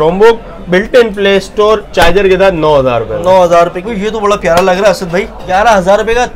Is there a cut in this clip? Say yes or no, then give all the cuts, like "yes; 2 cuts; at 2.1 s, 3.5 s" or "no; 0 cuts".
yes; 2 cuts; at 3.9 s, 5.4 s